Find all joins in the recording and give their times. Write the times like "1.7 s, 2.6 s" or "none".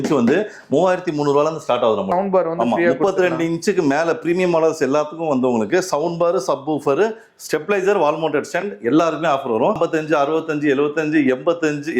2.1 s, 9.8 s